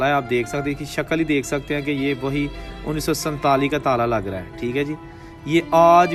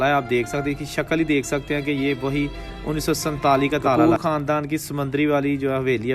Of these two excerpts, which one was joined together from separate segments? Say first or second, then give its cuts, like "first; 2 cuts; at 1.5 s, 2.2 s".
second; 1 cut; at 4.0 s